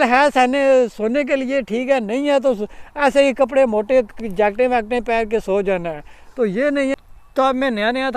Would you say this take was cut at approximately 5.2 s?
no; 1 cut; at 6.9 s

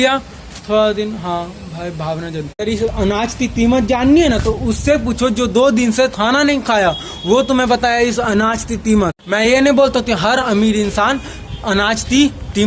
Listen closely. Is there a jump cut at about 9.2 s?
yes; 2 cuts; at 2.3 s, 9.2 s

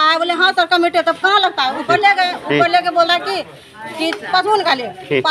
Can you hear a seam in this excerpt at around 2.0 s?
no; 0 cuts

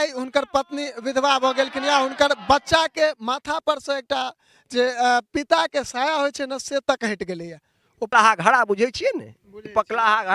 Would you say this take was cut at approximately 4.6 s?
no; 1 cut; at 8.1 s

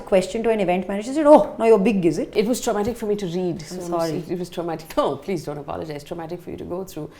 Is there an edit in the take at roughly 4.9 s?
no; 1 cut; at 2.3 s

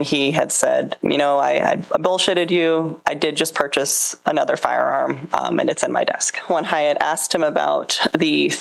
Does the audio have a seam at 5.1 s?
no; 3 cuts; at 0.9 s, 3.0 s, 6.4 s

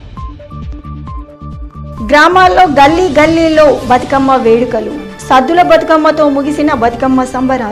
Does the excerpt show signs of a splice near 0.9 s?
yes; 1 cut; at 0.9 s

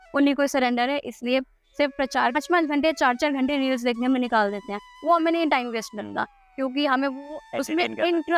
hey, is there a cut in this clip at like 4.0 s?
no; 1 cut; at 2.4 s

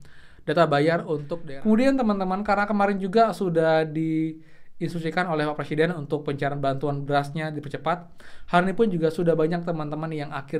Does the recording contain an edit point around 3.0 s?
no; 1 cut; at 1.3 s

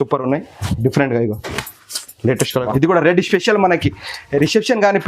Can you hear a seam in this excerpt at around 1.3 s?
no; 1 cut; at 2.7 s

